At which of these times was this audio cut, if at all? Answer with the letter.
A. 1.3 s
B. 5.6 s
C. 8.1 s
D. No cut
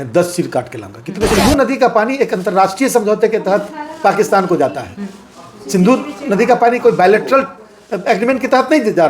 A